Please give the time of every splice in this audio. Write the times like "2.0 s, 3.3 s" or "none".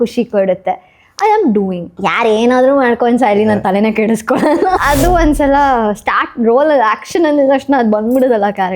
1.9 s, 4.8 s